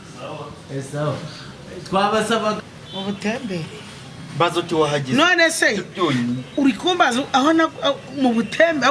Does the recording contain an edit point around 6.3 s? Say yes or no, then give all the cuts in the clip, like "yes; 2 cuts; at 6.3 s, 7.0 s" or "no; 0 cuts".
no; 1 cut; at 2.6 s